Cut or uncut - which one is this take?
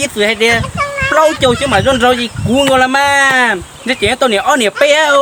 uncut